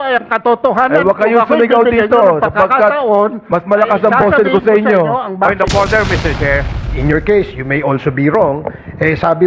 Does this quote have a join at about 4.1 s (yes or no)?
no